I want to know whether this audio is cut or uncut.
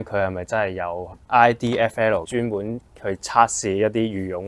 cut